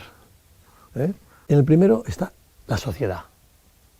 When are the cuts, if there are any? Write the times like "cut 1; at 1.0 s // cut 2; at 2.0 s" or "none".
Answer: cut 1; at 1.3 s